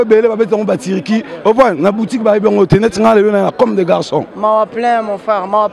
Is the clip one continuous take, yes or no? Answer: no